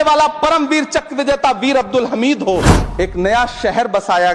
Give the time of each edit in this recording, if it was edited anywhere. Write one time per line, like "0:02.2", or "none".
0:02.8